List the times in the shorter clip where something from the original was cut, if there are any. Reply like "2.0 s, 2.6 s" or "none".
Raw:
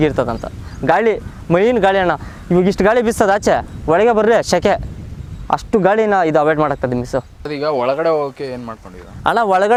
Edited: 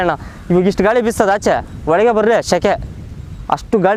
none